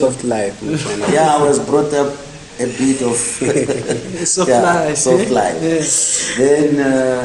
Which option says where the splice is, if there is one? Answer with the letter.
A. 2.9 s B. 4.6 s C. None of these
C